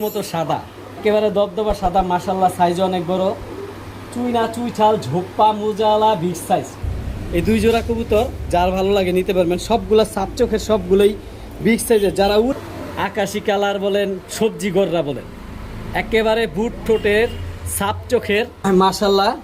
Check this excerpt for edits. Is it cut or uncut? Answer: cut